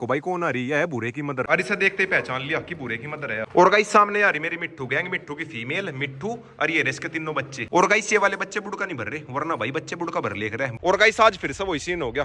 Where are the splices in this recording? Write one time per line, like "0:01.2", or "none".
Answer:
0:01.5
0:03.5
0:07.6
0:10.7